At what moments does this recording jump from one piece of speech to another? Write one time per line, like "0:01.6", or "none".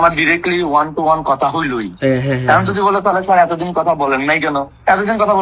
none